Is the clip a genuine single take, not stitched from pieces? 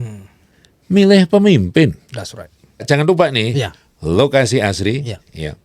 no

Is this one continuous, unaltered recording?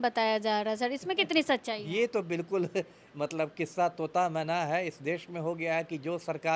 yes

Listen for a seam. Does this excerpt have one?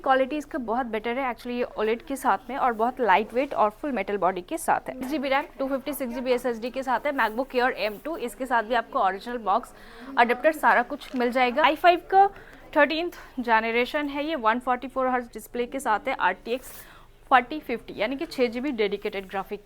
yes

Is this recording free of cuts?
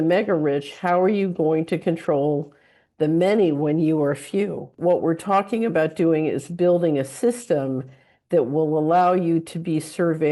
no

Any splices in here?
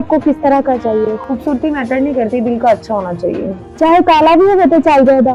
no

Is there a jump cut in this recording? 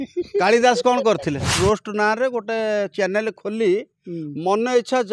yes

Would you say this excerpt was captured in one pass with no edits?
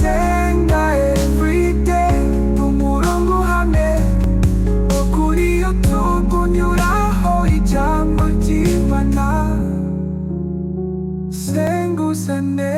yes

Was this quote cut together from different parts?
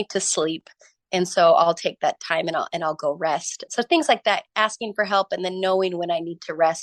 yes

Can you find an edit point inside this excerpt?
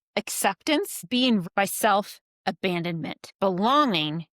yes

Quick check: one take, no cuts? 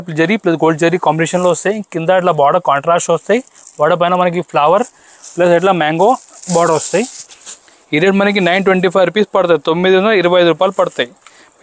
yes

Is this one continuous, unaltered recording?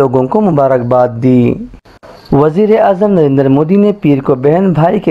yes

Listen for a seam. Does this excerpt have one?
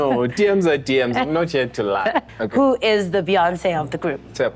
yes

